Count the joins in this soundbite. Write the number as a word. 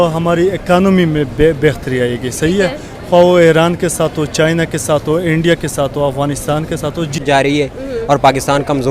one